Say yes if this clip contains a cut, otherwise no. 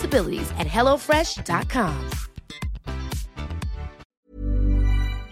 yes